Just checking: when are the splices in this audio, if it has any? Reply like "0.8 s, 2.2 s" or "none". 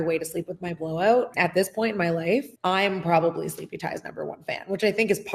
1.3 s